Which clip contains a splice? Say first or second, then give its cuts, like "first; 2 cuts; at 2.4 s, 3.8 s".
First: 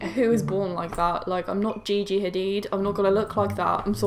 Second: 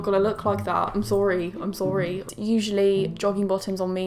second; 1 cut; at 2.3 s